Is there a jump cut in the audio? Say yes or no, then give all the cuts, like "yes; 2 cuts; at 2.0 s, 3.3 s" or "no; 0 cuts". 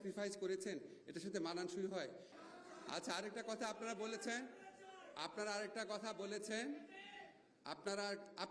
yes; 1 cut; at 2.3 s